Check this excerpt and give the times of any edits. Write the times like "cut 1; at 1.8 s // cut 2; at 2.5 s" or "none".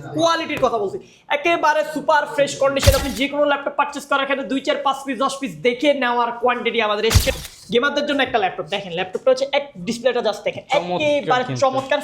cut 1; at 3.0 s // cut 2; at 7.4 s